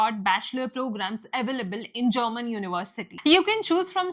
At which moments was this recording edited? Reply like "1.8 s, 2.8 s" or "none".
3.0 s